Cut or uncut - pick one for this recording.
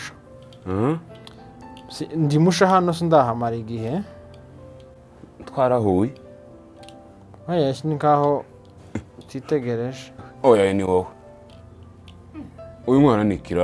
cut